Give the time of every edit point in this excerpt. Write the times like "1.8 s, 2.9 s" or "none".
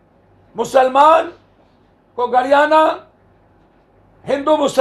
none

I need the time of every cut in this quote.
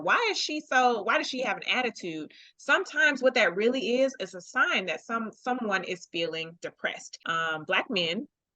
7.1 s

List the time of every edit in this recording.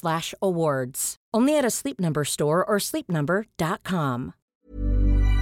4.4 s

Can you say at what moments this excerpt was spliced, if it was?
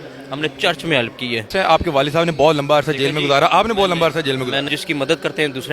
1.5 s, 4.7 s

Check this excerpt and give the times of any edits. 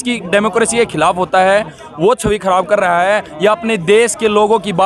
none

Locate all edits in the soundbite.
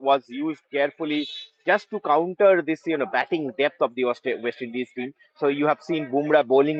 none

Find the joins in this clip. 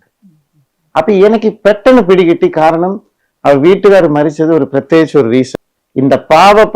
5.5 s

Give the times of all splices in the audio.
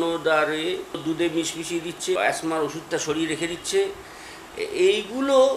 1.0 s, 2.2 s

